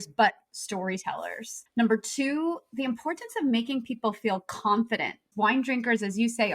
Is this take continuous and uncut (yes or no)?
no